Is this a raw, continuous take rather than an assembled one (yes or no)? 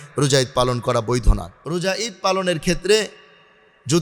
no